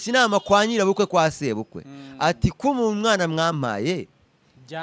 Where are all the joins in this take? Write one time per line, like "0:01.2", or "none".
none

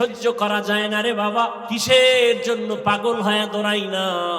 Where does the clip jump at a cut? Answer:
0:01.6

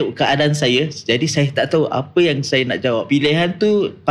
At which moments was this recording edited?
0:03.0

